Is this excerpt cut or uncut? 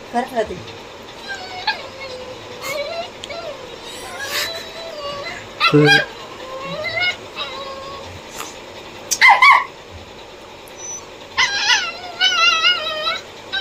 uncut